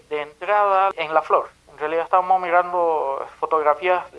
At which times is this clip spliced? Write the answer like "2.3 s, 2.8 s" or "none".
0.9 s

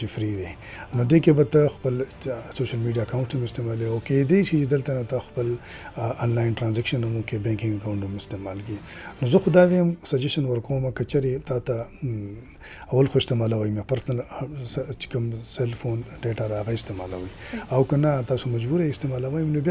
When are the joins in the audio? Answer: none

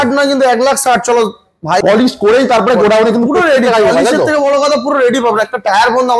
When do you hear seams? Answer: 1.8 s

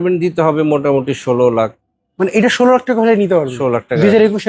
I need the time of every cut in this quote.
none

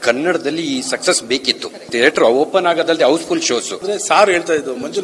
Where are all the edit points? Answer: 1.9 s, 3.8 s

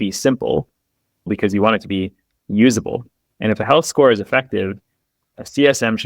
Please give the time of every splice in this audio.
1.3 s

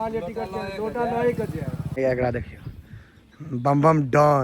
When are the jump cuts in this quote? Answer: 2.0 s

